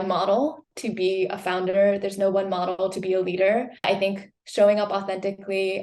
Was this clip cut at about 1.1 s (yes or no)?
no